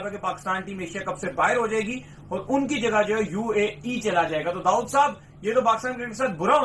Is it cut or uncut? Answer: uncut